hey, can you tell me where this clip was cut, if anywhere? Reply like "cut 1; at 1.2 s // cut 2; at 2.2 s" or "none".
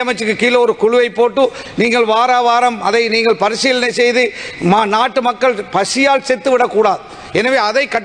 none